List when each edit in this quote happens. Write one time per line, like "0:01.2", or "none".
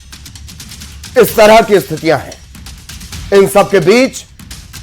0:02.0